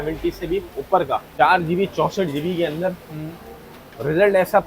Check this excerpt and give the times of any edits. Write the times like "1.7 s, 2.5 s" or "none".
1.3 s